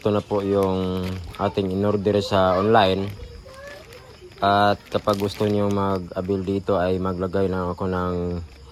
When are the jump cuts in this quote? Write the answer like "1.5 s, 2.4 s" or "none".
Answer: none